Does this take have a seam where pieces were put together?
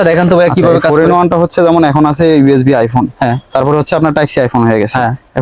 no; 0 cuts

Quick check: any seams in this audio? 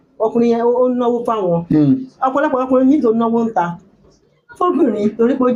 no; 0 cuts

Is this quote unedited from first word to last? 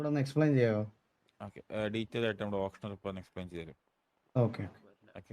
yes; 0 cuts

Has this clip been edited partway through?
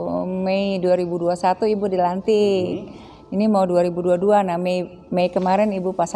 no; 0 cuts

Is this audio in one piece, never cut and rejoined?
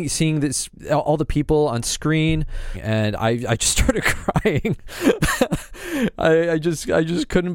no; 1 cut; at 2.8 s

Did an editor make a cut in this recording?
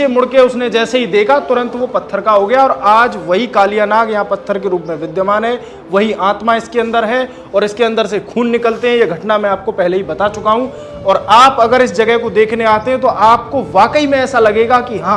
no; 0 cuts

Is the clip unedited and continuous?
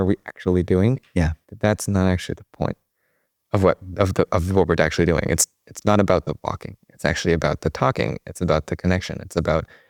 yes; 0 cuts

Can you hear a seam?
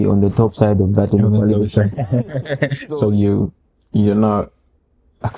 yes; 1 cut; at 2.8 s

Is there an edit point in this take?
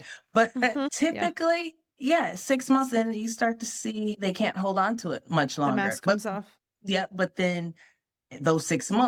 no; 0 cuts

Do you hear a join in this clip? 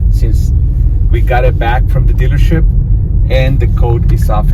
no; 0 cuts

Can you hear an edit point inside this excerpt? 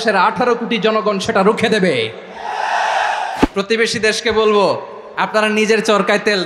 yes; 1 cut; at 3.4 s

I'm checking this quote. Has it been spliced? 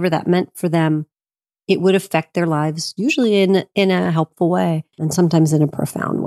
yes; 1 cut; at 5.1 s

